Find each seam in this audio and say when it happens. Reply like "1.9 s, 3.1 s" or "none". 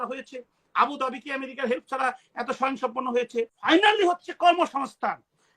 3.7 s